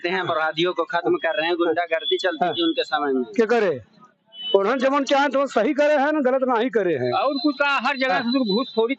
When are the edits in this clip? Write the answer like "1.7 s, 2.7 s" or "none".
7.1 s